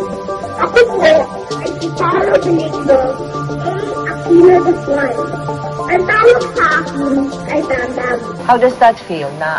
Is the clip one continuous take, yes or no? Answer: no